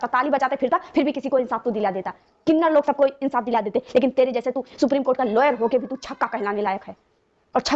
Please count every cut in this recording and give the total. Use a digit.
0